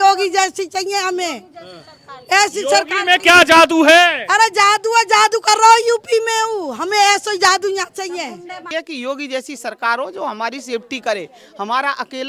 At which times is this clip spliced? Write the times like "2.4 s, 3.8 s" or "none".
8.6 s